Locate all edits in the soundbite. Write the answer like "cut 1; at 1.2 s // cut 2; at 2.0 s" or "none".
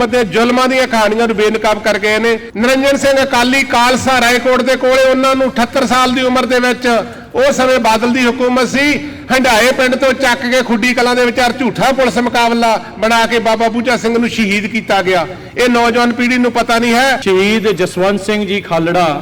cut 1; at 2.5 s // cut 2; at 17.2 s